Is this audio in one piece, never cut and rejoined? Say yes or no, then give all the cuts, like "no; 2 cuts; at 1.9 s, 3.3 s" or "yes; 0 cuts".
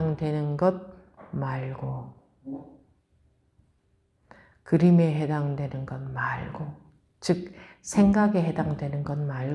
yes; 0 cuts